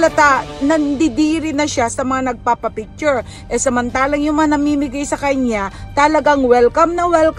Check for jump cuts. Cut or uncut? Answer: uncut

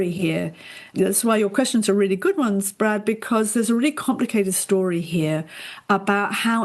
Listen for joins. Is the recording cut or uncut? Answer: cut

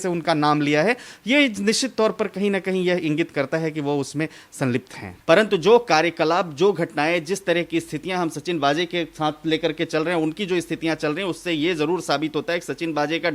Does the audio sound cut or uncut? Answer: cut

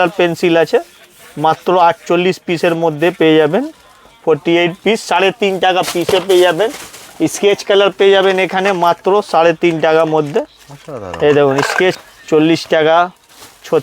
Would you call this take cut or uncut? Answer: cut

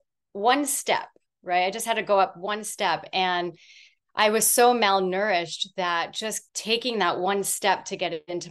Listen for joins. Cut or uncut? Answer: cut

